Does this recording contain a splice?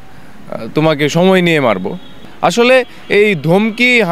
yes; 1 cut; at 2.1 s

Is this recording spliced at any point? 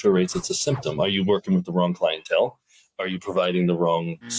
no; 0 cuts

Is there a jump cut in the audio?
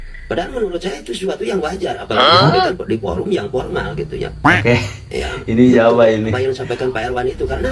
no; 0 cuts

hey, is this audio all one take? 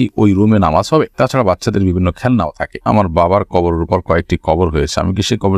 no; 1 cut; at 2.9 s

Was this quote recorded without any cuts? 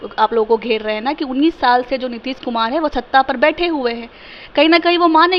yes; 0 cuts

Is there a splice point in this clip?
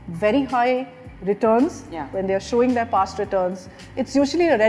no; 0 cuts

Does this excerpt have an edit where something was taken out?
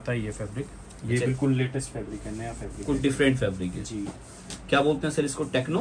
no; 0 cuts

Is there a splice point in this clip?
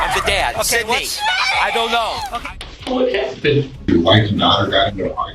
yes; 2 cuts; at 2.4 s, 3.9 s

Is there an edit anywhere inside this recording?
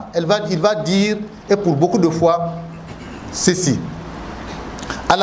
no; 0 cuts

